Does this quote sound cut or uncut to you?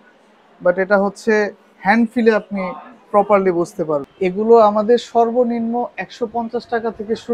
cut